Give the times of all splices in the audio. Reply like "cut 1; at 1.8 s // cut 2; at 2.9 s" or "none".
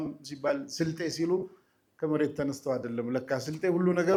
none